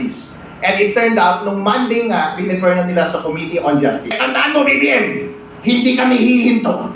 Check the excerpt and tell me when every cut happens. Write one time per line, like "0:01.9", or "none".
0:04.2